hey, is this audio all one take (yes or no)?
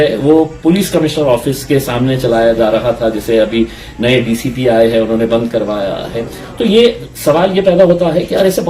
no